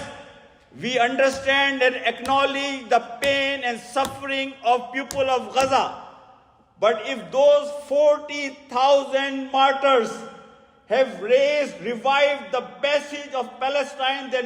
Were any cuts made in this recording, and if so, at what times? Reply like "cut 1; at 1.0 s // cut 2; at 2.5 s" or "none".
none